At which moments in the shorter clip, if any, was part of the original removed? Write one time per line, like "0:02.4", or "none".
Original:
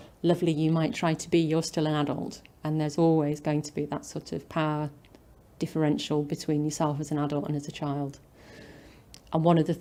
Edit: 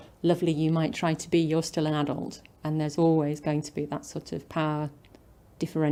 none